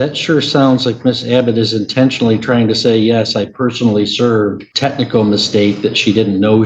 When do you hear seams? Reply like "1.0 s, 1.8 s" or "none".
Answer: 4.7 s